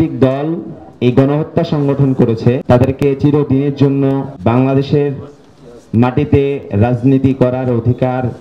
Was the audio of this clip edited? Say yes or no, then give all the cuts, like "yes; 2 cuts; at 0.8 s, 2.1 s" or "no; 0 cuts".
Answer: yes; 2 cuts; at 2.6 s, 4.3 s